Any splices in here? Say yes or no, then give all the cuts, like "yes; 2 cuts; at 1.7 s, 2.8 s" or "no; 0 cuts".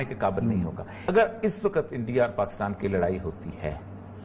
yes; 1 cut; at 1.1 s